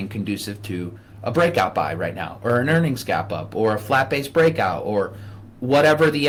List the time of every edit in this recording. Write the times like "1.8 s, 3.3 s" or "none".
none